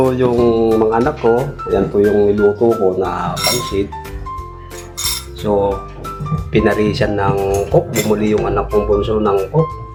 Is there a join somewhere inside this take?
no; 0 cuts

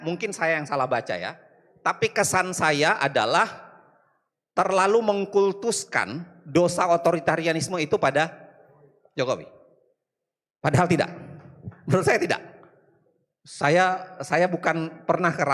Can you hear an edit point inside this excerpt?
no; 0 cuts

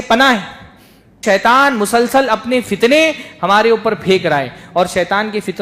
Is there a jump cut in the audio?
yes; 1 cut; at 1.2 s

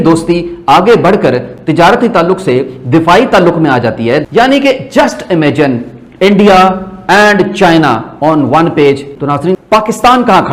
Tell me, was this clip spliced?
yes; 2 cuts; at 4.2 s, 9.6 s

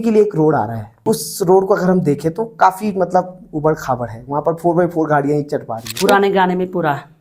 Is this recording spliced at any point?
yes; 2 cuts; at 1.0 s, 5.9 s

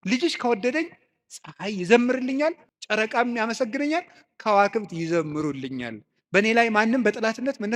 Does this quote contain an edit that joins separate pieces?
yes; 1 cut; at 2.7 s

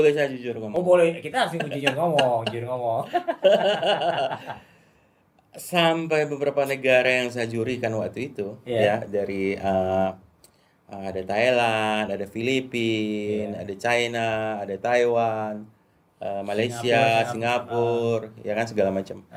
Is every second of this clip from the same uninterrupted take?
yes; 0 cuts

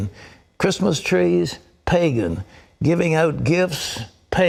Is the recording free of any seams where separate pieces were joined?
yes; 0 cuts

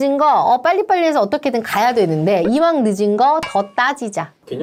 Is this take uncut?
yes; 0 cuts

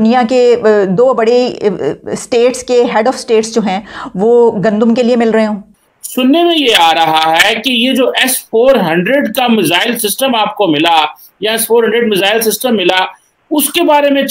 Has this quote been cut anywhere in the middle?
no; 0 cuts

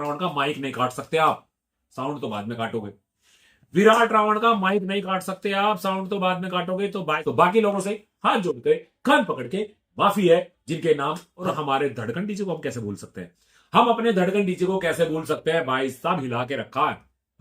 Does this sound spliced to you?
yes; 2 cuts; at 7.2 s, 11.3 s

